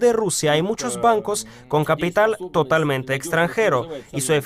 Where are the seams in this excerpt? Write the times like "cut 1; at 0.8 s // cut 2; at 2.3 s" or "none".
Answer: none